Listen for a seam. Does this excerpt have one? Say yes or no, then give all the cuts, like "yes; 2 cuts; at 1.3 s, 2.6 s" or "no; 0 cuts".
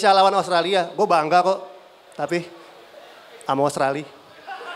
no; 0 cuts